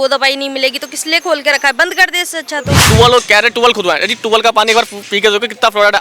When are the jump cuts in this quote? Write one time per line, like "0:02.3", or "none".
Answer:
0:02.8

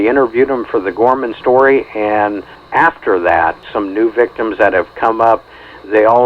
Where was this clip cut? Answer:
0:02.6
0:03.6

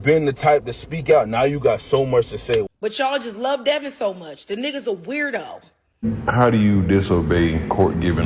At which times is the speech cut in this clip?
0:02.7
0:06.0

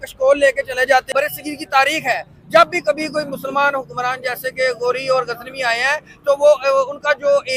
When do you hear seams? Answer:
0:01.1

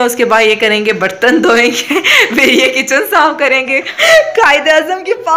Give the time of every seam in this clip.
0:03.9

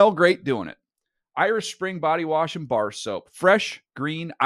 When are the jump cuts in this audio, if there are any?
none

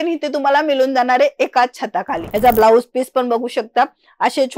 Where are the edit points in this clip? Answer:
0:02.2

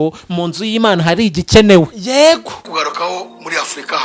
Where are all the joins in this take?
0:02.6

